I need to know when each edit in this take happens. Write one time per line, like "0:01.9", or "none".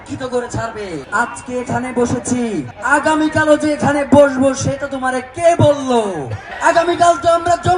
0:01.0

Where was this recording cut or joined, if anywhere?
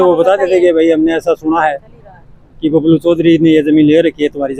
none

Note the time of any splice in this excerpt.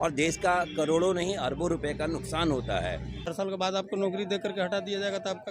0:03.3

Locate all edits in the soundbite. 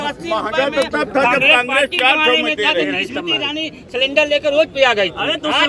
none

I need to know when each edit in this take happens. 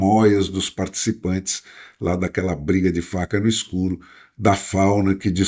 none

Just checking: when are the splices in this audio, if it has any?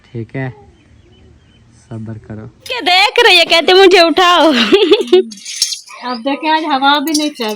0:02.8

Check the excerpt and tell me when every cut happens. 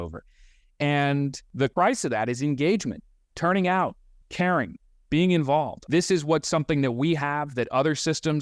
0:01.6
0:05.8

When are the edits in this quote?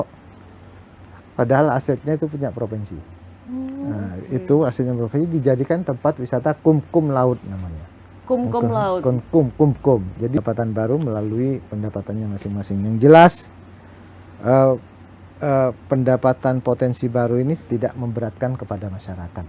0:10.4

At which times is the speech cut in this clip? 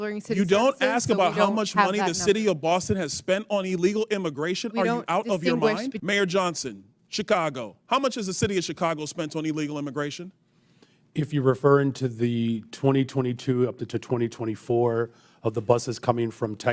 0:06.0

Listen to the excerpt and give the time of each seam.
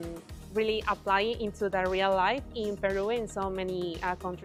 none

